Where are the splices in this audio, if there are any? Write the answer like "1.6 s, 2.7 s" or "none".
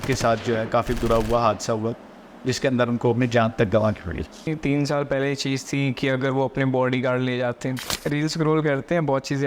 4.5 s, 7.9 s